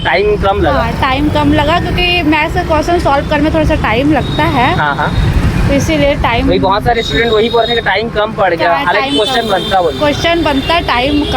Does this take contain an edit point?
no; 0 cuts

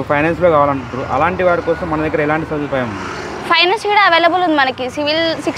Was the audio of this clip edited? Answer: no; 0 cuts

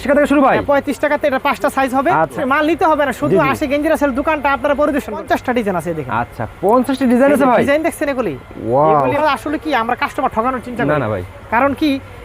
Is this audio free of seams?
no; 3 cuts; at 2.4 s, 5.2 s, 9.2 s

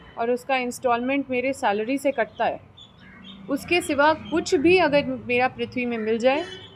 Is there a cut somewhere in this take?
no; 0 cuts

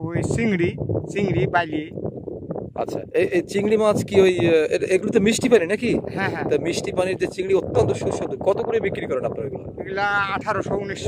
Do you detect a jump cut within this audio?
no; 0 cuts

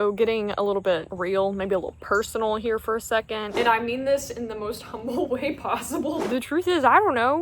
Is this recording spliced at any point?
yes; 2 cuts; at 3.5 s, 6.2 s

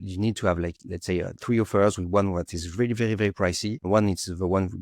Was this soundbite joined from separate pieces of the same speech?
yes; 1 cut; at 3.8 s

